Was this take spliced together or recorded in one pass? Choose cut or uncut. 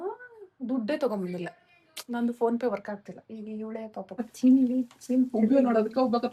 cut